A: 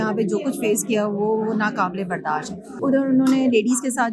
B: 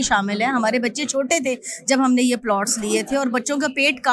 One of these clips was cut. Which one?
A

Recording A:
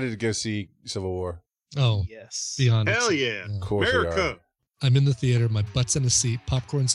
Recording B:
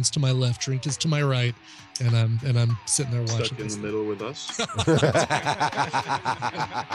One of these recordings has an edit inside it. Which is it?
A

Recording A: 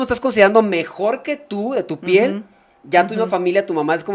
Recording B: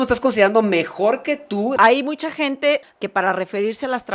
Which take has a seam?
B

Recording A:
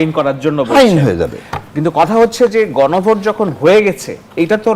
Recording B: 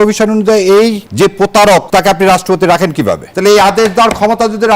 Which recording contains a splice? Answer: B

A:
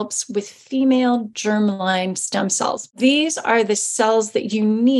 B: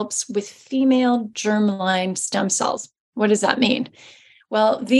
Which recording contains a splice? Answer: A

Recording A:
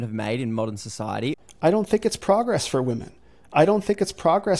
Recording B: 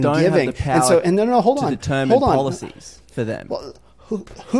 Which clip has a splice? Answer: A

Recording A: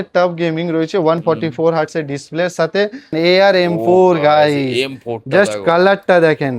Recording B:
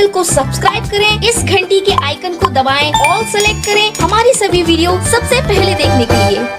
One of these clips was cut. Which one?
A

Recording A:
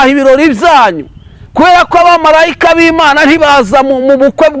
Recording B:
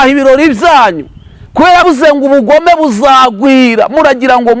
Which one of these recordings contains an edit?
B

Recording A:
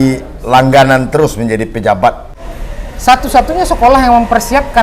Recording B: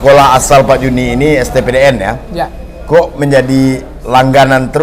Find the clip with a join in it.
A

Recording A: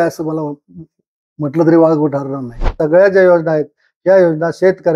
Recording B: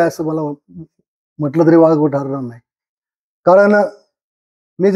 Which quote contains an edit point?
A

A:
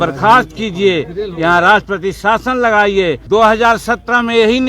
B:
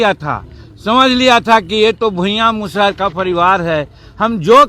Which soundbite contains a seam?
A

